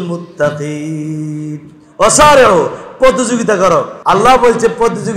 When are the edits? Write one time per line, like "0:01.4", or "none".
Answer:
0:03.9